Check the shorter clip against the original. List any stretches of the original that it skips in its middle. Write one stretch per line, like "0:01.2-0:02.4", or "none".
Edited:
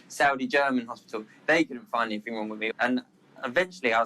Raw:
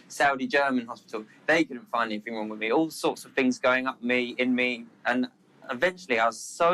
0:02.6-0:04.9